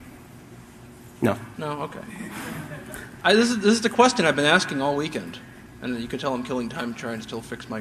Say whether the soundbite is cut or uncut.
uncut